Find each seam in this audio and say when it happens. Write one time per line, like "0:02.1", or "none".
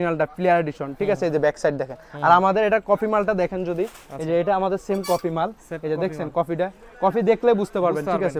none